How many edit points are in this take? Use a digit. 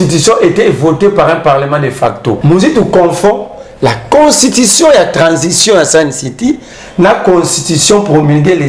1